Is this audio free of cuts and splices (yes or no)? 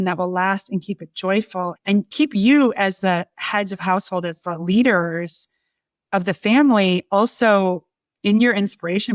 yes